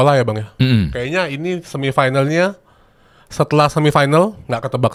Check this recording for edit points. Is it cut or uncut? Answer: uncut